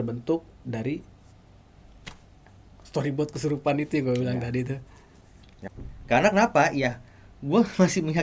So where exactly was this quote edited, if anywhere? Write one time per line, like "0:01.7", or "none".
0:05.7